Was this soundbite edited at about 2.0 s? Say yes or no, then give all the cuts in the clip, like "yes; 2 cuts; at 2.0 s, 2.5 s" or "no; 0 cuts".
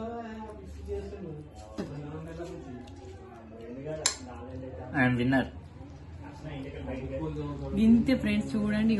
no; 0 cuts